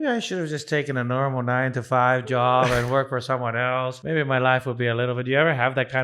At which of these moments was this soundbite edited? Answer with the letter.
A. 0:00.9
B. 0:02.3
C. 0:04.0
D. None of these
C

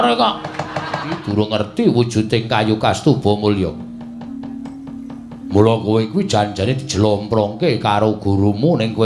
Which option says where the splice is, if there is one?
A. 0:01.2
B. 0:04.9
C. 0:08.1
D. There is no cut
A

